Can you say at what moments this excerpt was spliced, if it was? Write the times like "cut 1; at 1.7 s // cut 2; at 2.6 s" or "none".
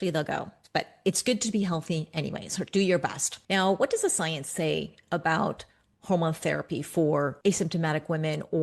cut 1; at 3.3 s // cut 2; at 7.3 s